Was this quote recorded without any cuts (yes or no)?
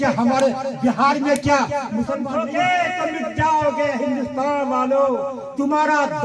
no